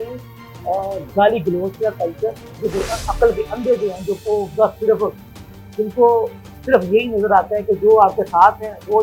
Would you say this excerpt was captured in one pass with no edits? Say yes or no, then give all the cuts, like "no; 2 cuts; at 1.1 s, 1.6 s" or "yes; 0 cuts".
no; 1 cut; at 2.6 s